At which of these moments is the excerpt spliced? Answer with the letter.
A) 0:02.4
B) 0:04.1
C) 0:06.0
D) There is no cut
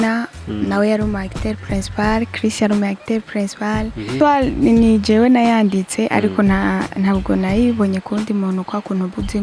B